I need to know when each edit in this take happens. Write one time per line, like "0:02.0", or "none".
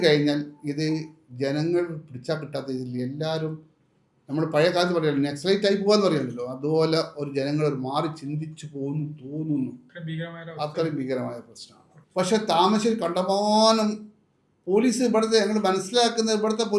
none

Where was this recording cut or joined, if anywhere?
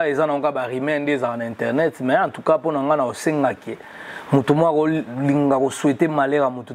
none

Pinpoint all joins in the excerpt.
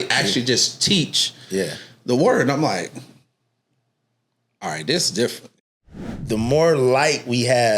0:05.6

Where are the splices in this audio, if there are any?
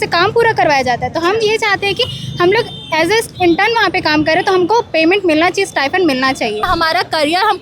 0:06.6

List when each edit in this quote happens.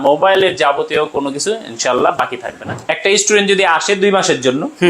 0:02.7

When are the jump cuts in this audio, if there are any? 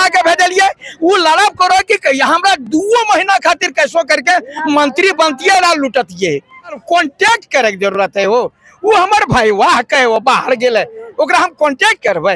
0:06.8

